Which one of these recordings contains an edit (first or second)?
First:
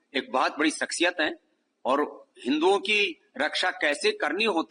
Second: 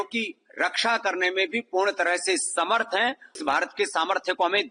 second